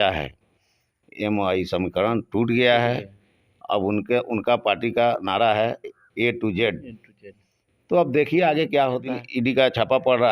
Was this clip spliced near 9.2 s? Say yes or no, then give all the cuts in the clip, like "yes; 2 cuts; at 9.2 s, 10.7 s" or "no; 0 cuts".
yes; 1 cut; at 9.2 s